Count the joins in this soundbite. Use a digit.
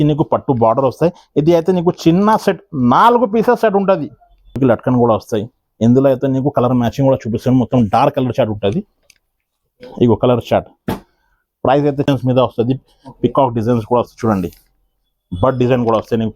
2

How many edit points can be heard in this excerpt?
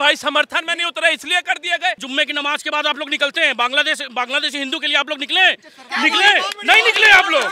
1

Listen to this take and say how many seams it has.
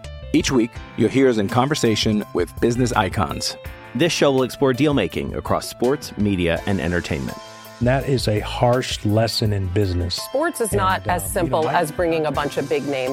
0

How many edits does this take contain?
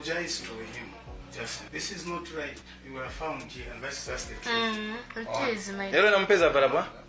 1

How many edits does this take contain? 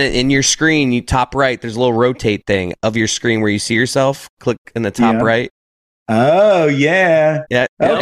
0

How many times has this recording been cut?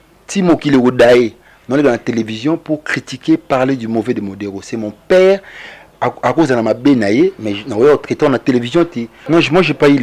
1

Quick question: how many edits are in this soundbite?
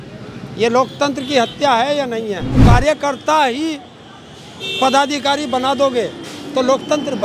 1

